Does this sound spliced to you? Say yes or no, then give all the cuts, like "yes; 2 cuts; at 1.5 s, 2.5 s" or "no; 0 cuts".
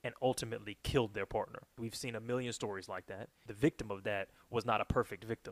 yes; 2 cuts; at 1.7 s, 3.4 s